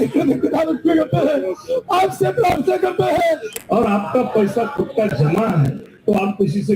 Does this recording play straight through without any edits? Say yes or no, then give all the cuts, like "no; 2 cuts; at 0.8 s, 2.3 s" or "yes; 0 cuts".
no; 1 cut; at 3.6 s